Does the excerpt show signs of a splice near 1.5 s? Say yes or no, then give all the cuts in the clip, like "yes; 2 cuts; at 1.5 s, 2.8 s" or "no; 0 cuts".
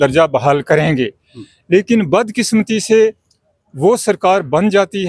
no; 0 cuts